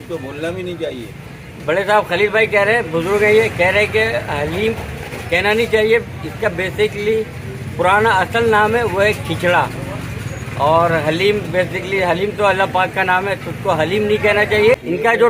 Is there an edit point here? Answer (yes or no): no